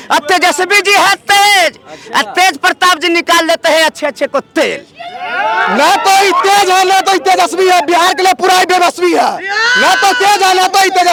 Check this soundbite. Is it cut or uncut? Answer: uncut